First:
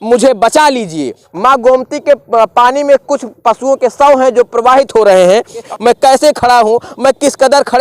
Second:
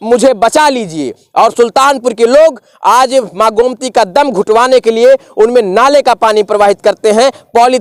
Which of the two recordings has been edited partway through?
first; 2 cuts; at 1.2 s, 5.7 s

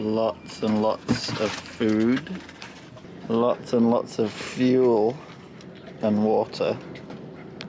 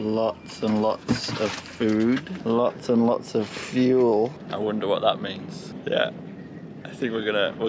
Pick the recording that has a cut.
second; 3 cuts; at 2.3 s, 4.4 s, 5.7 s

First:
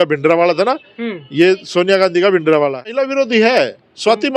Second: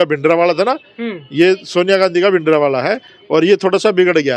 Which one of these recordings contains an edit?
first; 1 cut; at 2.9 s

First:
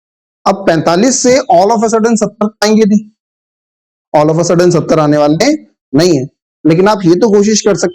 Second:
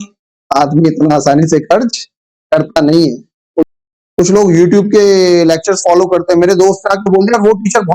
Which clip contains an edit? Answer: second; 1 cut; at 3.7 s

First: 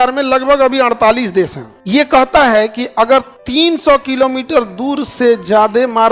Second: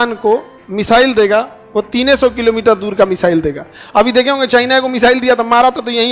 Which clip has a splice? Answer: first; 2 cuts; at 1.7 s, 3.4 s

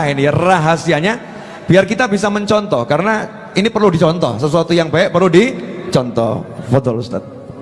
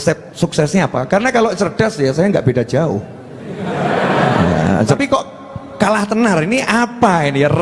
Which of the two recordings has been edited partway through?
second; 1 cut; at 5.0 s

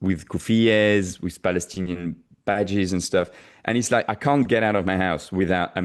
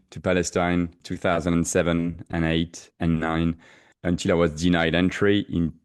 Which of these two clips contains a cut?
second; 2 cuts; at 1.0 s, 3.8 s

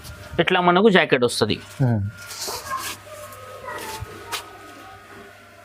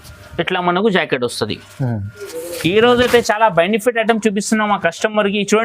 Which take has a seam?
second; 1 cut; at 2.3 s

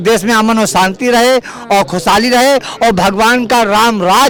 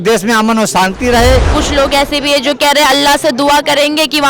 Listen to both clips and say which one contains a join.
second; 1 cut; at 1.6 s

